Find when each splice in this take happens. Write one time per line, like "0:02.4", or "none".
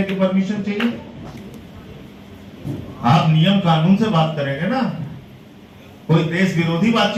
none